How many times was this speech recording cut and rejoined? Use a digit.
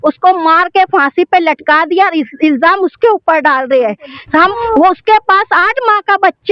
1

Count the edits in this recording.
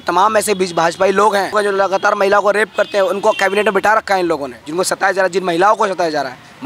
2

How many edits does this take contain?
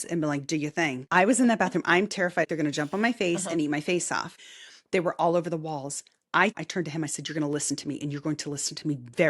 4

